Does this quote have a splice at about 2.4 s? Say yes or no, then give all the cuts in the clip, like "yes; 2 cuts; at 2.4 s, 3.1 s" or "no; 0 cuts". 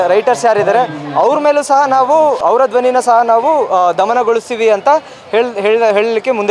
yes; 1 cut; at 2.4 s